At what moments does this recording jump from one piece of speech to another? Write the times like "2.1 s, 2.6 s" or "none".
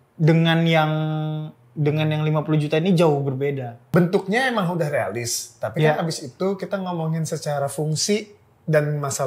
3.7 s